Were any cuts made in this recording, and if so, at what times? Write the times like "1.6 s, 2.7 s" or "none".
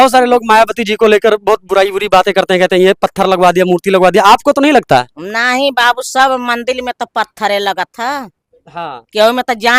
none